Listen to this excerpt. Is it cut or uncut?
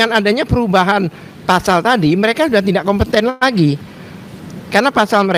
uncut